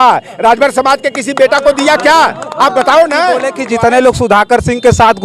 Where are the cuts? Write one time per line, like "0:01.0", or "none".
0:03.6